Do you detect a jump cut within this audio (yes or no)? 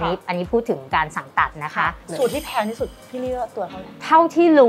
yes